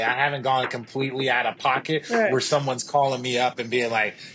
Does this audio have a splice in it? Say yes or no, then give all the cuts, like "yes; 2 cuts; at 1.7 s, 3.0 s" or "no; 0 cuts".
no; 0 cuts